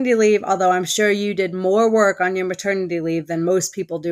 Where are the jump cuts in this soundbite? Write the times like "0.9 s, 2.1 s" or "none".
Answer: none